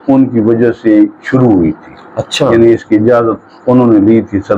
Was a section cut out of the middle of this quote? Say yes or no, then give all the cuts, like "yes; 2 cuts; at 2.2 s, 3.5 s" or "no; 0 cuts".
no; 0 cuts